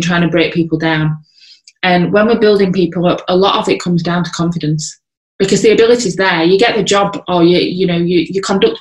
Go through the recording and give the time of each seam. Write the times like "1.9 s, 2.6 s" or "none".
none